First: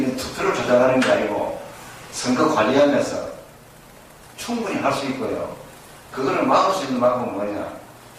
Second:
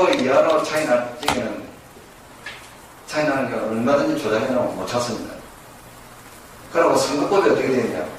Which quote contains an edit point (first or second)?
first